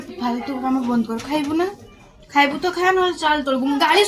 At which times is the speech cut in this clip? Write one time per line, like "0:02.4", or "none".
none